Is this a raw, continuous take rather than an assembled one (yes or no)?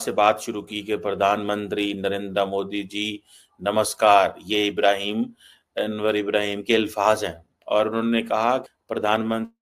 no